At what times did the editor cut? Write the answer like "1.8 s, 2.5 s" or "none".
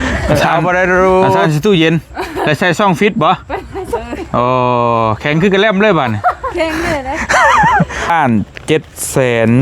1.5 s, 8.1 s

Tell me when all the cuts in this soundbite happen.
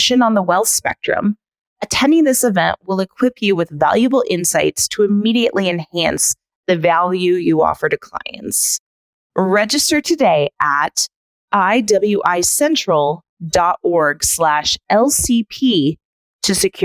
9.2 s

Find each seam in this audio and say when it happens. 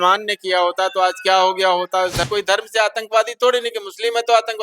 2.3 s

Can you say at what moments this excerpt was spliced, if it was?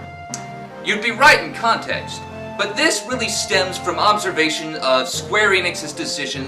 3.0 s

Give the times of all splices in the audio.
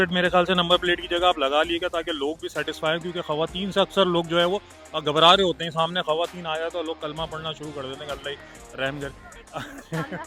none

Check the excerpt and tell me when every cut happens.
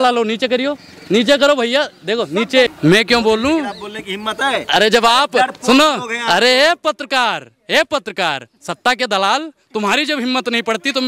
2.7 s

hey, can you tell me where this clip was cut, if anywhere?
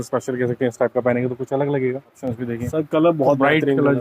2.2 s

